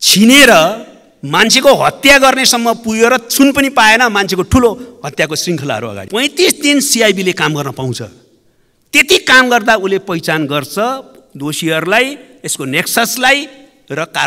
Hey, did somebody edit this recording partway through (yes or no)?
yes